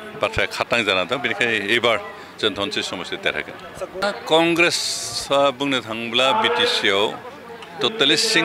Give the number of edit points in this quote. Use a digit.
1